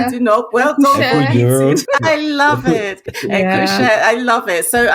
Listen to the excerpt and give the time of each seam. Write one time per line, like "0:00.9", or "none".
0:01.8
0:03.1